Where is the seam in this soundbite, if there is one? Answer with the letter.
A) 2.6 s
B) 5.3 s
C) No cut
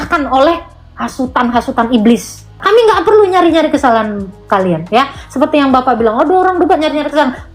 A